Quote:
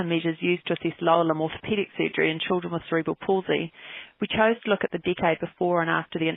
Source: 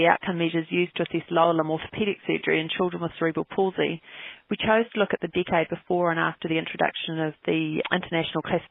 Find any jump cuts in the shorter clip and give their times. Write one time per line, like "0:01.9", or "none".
none